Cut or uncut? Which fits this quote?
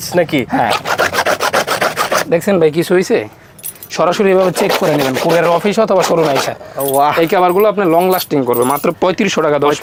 uncut